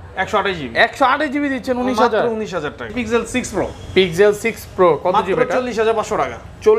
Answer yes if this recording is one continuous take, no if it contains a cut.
no